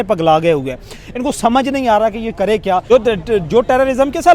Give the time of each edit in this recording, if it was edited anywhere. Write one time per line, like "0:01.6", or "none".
0:02.8